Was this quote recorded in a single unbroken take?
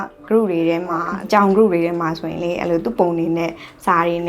no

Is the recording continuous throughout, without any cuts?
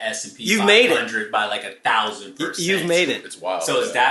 yes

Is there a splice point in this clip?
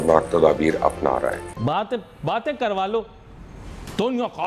yes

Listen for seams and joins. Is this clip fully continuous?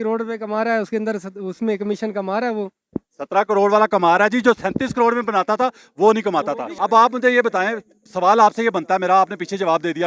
no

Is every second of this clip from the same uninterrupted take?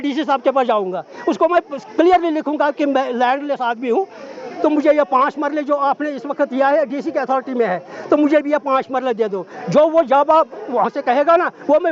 yes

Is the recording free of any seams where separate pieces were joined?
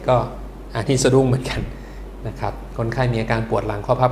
yes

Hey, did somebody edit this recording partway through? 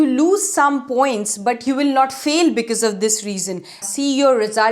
yes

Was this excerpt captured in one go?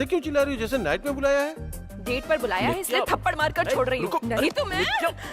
yes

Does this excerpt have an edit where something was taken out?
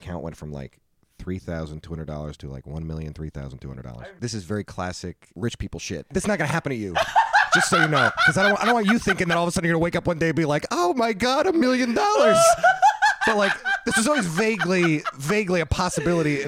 yes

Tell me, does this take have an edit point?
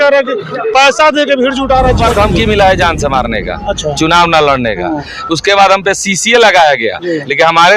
yes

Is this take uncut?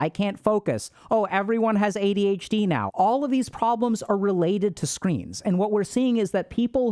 no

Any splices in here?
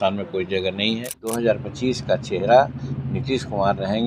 yes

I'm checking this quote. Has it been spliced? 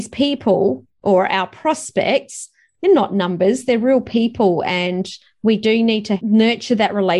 yes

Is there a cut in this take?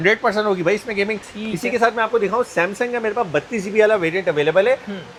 no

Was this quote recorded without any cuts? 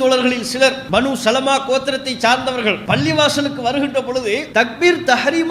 no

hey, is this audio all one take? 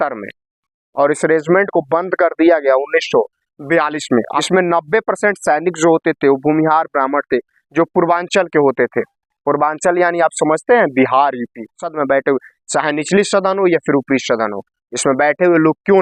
no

